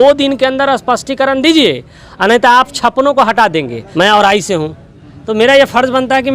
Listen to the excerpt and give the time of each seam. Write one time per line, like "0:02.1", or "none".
0:03.8